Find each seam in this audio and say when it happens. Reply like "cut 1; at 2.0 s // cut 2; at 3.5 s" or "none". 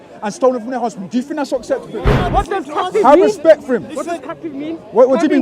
cut 1; at 2.2 s